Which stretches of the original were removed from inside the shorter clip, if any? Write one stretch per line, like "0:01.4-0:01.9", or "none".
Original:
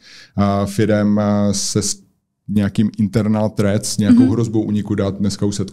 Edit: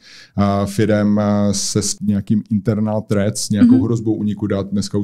0:01.9-0:02.4